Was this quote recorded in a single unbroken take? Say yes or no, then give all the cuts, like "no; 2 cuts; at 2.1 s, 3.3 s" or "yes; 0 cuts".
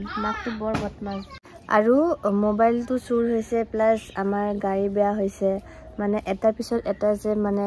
no; 1 cut; at 1.3 s